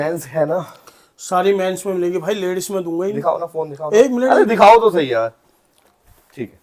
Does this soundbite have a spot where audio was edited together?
no; 0 cuts

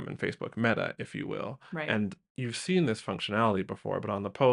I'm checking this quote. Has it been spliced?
no; 0 cuts

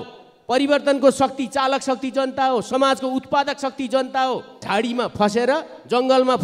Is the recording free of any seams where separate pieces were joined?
no; 1 cut; at 4.6 s

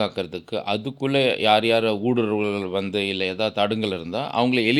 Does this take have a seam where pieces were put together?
no; 0 cuts

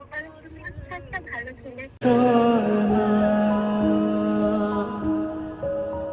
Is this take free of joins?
yes; 0 cuts

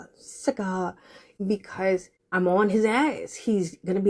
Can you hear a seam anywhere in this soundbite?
yes; 2 cuts; at 1.2 s, 2.2 s

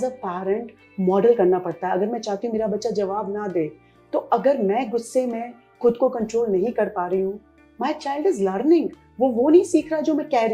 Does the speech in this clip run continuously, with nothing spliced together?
yes; 0 cuts

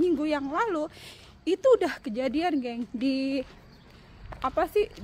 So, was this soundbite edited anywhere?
no; 0 cuts

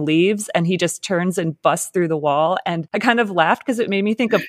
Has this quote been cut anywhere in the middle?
yes; 1 cut; at 2.9 s

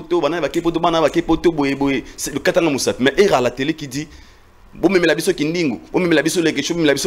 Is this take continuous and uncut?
yes; 0 cuts

